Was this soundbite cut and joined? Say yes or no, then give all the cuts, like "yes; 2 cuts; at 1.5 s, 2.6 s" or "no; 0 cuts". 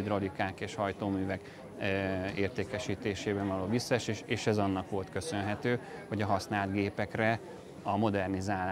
no; 0 cuts